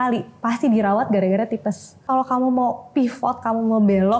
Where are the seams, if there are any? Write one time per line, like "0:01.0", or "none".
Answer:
0:02.0

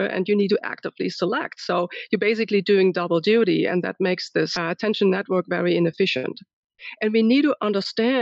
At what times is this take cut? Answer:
0:04.6
0:06.6

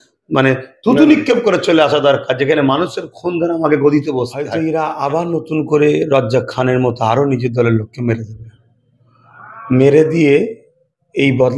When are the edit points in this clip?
0:04.4

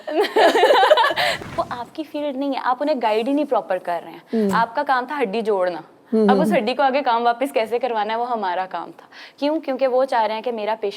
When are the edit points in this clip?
0:01.3

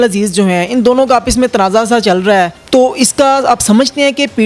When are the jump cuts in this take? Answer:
0:02.6

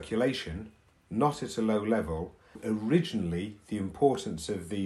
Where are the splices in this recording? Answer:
0:02.6

